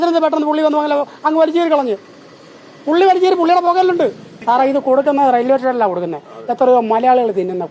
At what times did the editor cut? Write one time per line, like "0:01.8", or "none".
0:04.3